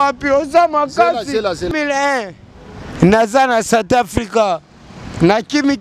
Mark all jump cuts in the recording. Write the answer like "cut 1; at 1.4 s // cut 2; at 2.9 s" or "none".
cut 1; at 1.7 s